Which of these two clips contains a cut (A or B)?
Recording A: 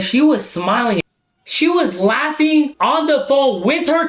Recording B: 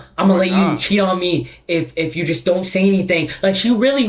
A